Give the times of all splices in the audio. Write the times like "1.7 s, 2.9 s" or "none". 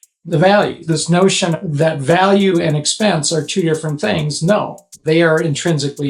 0.9 s, 4.9 s

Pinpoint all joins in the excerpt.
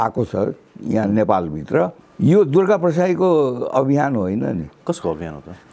2.0 s, 4.7 s

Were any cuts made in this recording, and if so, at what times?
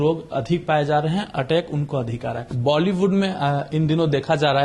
2.5 s

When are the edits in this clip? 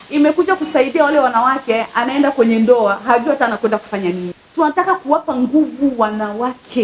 4.4 s

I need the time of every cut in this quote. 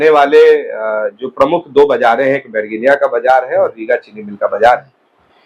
none

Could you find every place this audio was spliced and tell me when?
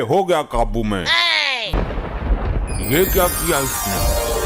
1.7 s

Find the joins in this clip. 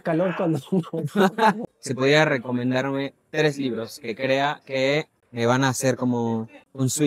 1.6 s

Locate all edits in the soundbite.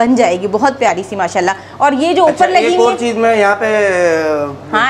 none

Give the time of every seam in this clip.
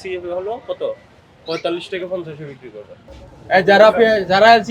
3.3 s

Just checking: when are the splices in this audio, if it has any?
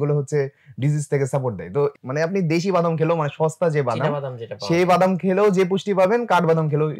1.9 s

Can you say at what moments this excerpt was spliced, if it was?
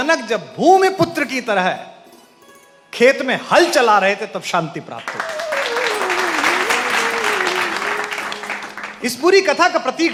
none

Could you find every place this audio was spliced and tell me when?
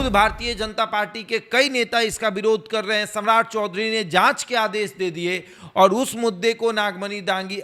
none

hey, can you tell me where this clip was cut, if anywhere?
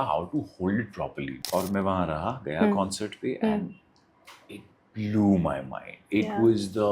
1.3 s

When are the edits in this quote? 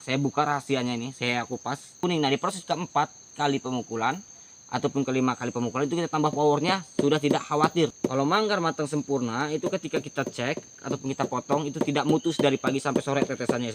2.0 s, 7.9 s

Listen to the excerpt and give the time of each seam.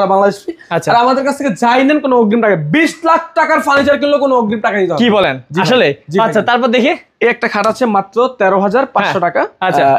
none

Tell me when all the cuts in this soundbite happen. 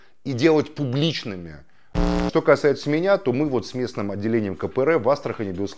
2.2 s

